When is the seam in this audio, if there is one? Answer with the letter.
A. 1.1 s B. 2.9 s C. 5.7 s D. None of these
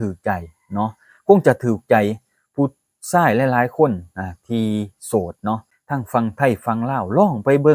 C